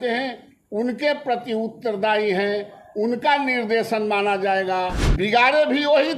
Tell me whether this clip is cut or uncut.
cut